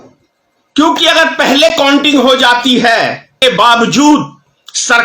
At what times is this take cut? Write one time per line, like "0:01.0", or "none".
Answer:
0:03.4

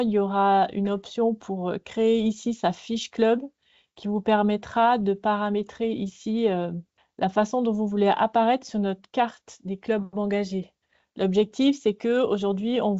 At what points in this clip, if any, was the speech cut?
none

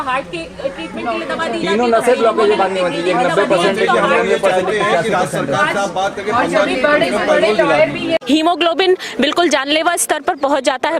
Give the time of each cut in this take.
0:08.2

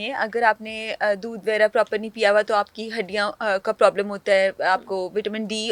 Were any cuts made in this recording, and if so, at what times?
none

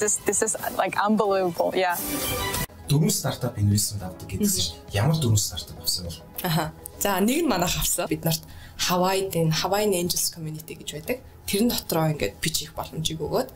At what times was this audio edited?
0:02.7
0:08.1

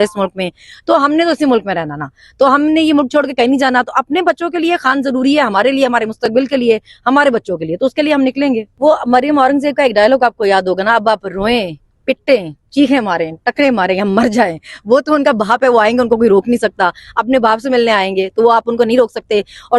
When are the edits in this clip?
0:08.7

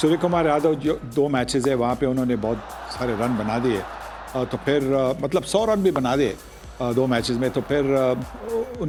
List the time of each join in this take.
none

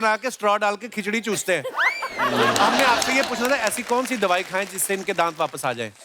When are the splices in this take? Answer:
none

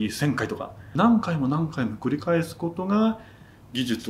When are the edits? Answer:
0:00.9

